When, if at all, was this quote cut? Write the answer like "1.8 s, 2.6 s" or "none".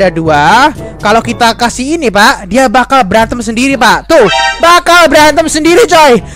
none